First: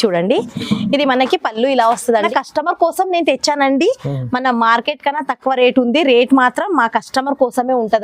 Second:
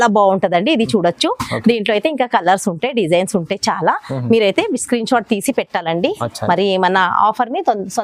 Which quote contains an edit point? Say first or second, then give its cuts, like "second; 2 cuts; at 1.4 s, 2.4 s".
first; 1 cut; at 2.3 s